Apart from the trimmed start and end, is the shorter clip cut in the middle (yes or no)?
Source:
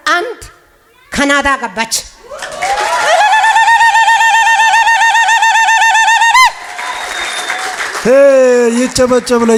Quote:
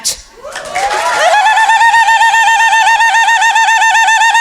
no